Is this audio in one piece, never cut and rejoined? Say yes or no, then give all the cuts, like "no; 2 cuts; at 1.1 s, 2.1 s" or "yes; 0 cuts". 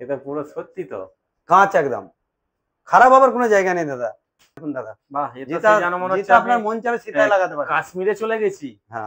no; 1 cut; at 4.6 s